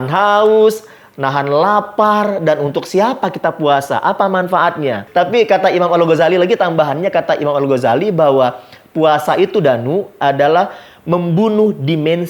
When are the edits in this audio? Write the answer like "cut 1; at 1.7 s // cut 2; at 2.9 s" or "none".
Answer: cut 1; at 5.0 s

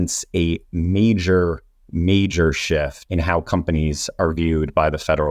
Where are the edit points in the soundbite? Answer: cut 1; at 3.0 s

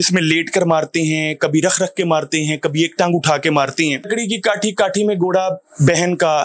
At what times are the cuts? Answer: cut 1; at 4.1 s

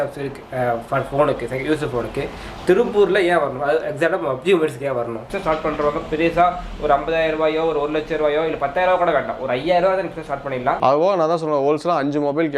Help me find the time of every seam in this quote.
cut 1; at 5.3 s // cut 2; at 10.8 s

